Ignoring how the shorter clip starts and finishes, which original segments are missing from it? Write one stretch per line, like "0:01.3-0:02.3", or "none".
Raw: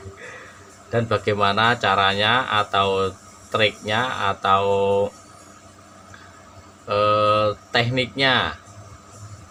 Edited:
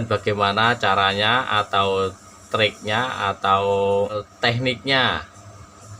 0:05.1-0:07.5